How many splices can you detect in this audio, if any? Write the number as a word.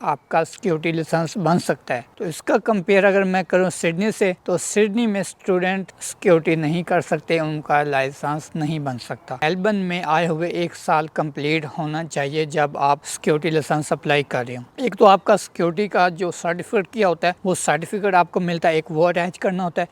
two